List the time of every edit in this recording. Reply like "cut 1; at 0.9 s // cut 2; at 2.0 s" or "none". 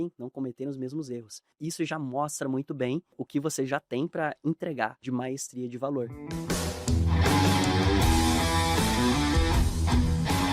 cut 1; at 1.5 s // cut 2; at 3.2 s // cut 3; at 5.0 s // cut 4; at 6.2 s